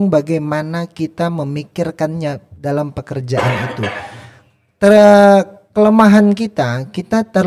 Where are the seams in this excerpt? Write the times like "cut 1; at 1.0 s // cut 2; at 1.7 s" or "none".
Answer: none